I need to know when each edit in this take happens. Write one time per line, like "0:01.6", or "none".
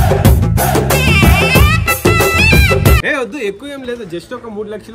0:03.0